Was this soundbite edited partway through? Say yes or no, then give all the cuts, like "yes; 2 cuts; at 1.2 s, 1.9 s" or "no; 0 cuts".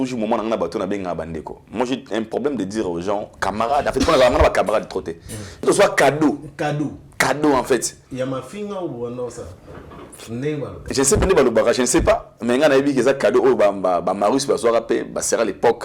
yes; 1 cut; at 5.6 s